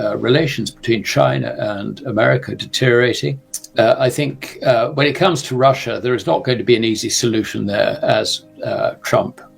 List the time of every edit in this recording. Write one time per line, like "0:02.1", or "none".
none